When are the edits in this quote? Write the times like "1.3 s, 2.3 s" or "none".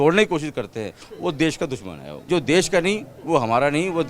2.3 s